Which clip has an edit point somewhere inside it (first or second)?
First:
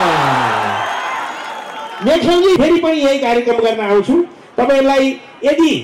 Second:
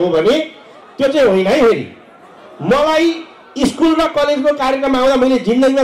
first